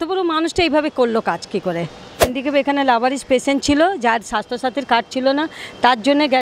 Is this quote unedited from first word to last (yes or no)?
no